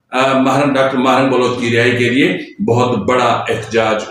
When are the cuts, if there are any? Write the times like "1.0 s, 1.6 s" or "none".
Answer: none